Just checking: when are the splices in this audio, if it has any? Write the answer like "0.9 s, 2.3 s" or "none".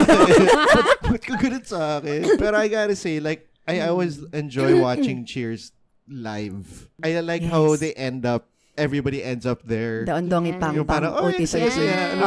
2.4 s, 6.9 s